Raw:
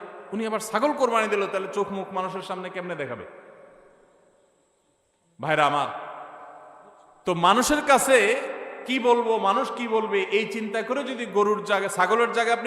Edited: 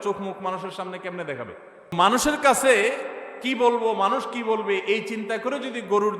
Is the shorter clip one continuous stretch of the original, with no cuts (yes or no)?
no